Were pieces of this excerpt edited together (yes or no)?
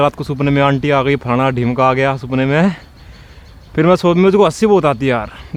no